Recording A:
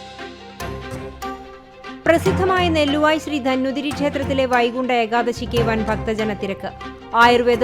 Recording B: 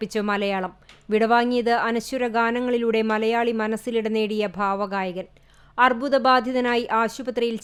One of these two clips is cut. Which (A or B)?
A